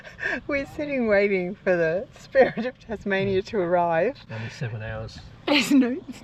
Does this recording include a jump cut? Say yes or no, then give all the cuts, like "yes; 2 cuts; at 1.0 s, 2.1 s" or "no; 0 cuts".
no; 0 cuts